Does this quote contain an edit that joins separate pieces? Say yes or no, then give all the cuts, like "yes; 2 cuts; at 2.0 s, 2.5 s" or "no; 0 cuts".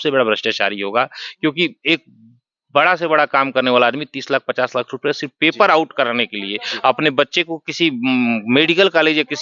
no; 0 cuts